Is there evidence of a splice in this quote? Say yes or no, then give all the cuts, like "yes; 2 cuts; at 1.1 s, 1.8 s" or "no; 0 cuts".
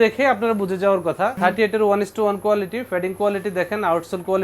yes; 1 cut; at 1.3 s